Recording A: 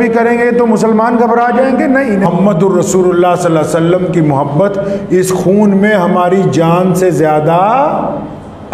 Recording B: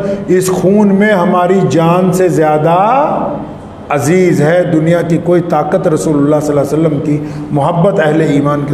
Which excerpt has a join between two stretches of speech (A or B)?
A